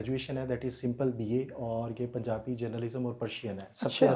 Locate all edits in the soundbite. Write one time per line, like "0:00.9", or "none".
none